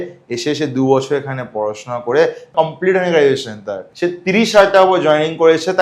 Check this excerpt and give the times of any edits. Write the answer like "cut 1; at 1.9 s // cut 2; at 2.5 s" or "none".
cut 1; at 2.5 s // cut 2; at 3.8 s